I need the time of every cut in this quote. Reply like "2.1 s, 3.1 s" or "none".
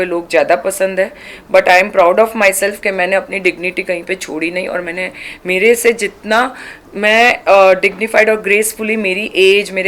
none